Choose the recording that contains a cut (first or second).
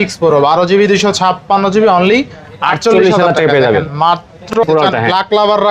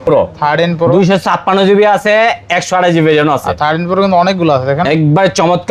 first